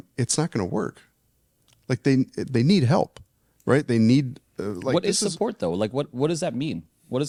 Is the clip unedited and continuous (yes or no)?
yes